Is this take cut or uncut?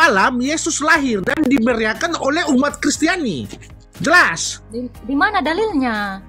uncut